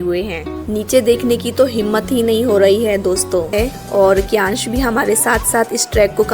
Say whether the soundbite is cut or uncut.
cut